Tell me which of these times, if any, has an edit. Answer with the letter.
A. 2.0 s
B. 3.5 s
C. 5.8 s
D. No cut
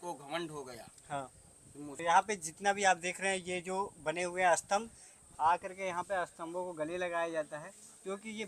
A